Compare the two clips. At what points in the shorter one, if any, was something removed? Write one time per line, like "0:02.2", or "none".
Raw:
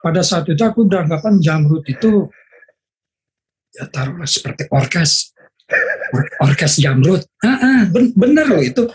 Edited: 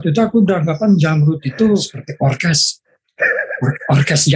0:02.0